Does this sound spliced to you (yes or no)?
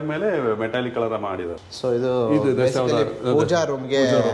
yes